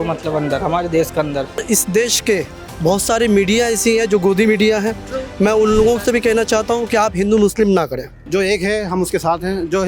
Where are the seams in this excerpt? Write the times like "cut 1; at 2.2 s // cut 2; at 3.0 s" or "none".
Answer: cut 1; at 1.6 s // cut 2; at 8.1 s